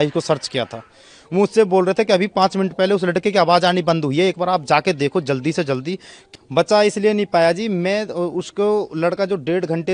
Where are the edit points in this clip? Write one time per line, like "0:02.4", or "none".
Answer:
0:06.1